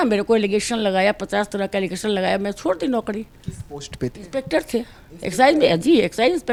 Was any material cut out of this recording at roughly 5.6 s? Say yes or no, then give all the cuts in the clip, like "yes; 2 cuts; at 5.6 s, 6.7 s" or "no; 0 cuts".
no; 0 cuts